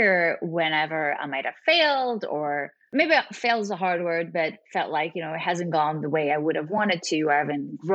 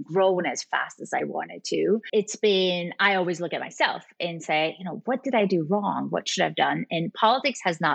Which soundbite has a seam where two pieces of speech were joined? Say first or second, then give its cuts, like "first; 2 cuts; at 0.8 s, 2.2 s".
first; 1 cut; at 2.8 s